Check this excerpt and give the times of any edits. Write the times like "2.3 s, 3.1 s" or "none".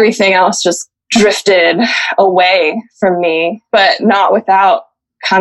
0.9 s, 3.6 s